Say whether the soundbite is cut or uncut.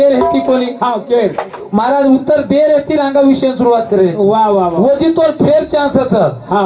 uncut